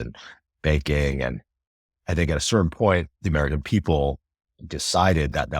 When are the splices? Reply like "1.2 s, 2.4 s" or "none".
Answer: 3.2 s